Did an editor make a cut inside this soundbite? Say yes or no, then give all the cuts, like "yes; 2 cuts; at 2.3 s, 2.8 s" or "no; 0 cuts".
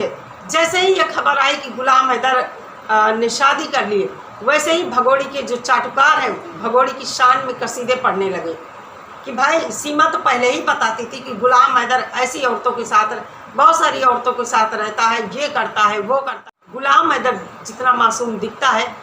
yes; 1 cut; at 16.4 s